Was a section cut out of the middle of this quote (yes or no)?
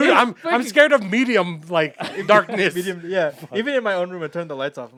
no